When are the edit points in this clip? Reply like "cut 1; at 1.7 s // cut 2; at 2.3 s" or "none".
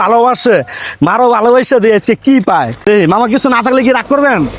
cut 1; at 2.8 s